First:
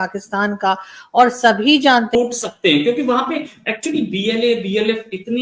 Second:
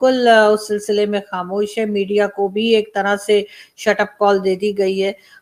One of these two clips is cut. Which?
first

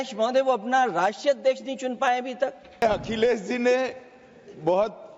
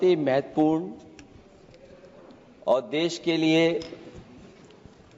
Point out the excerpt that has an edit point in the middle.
first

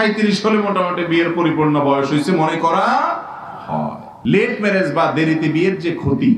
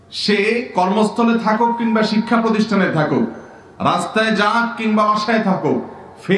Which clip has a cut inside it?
first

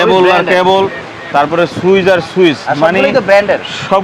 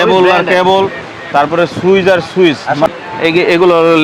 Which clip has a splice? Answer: second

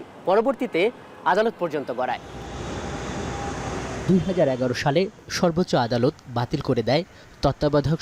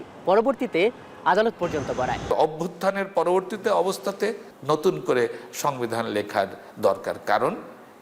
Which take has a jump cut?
second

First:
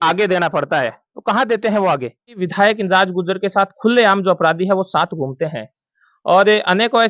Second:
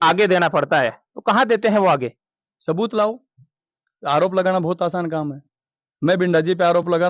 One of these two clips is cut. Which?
first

